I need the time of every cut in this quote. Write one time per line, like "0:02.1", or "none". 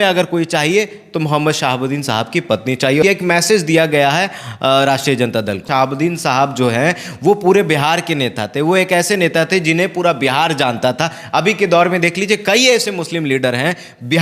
0:03.0
0:05.6